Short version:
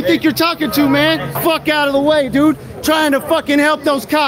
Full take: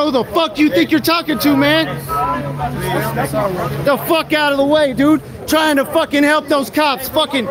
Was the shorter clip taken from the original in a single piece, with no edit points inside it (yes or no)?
no